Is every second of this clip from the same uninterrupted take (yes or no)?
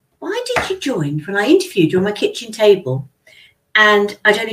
yes